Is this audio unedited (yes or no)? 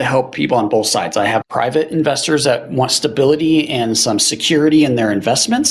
no